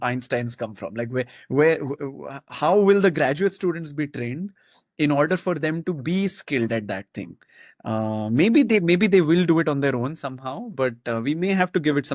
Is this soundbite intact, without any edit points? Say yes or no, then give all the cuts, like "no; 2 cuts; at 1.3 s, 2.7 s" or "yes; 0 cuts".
yes; 0 cuts